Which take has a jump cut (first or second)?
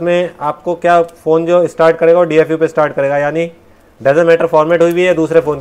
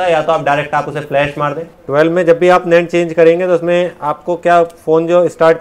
second